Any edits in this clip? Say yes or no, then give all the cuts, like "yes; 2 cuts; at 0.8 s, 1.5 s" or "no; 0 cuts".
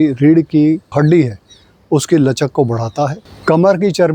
yes; 1 cut; at 0.9 s